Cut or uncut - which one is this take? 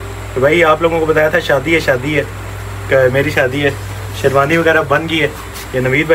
uncut